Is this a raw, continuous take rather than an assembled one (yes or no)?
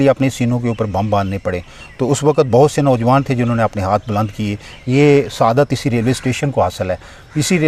yes